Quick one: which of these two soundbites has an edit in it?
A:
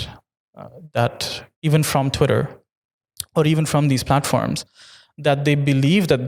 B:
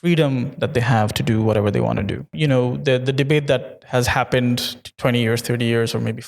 B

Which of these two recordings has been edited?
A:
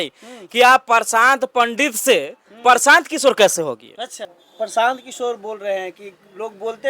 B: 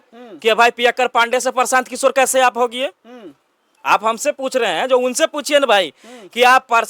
A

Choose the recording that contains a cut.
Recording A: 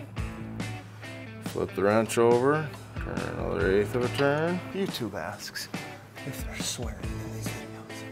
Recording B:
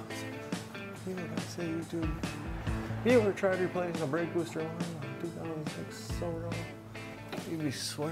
A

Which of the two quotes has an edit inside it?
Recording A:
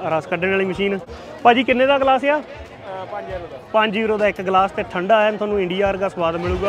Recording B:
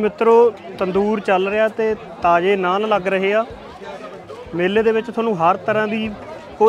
A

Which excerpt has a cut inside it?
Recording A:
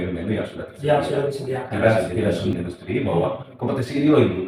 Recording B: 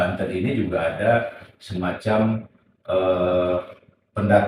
A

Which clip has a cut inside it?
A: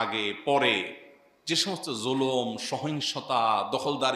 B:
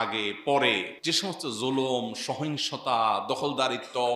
B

